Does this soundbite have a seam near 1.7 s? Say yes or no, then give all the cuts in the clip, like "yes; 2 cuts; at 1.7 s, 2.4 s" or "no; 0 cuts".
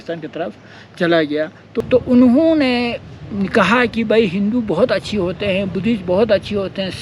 yes; 1 cut; at 1.7 s